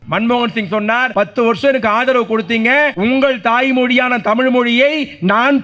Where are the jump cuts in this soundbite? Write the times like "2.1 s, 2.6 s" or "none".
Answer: 1.1 s, 2.9 s

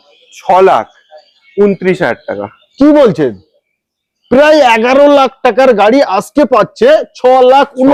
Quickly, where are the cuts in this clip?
none

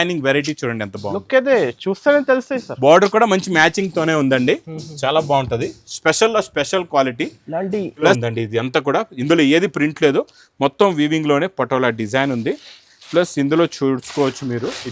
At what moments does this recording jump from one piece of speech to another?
8.2 s

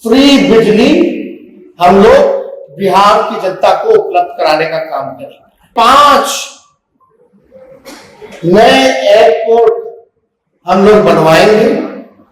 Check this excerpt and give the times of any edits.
5.7 s

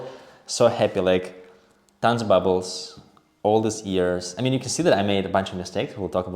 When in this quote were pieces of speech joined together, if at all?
none

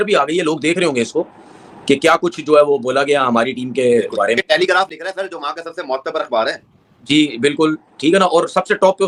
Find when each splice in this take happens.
none

